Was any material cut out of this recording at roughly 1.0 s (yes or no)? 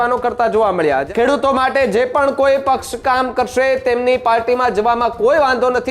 yes